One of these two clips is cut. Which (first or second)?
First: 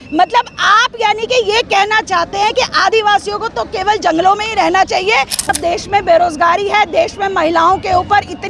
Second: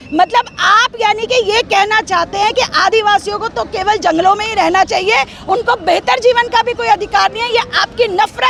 first